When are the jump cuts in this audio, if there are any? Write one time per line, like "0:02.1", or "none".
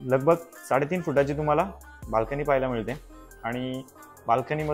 none